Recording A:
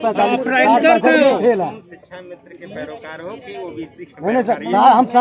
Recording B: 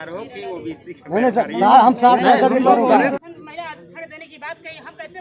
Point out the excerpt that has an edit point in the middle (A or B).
B